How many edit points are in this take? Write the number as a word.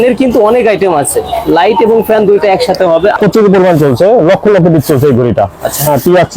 one